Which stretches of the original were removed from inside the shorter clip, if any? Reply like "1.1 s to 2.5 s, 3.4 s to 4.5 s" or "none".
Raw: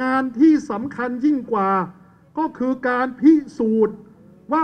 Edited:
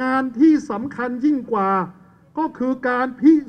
none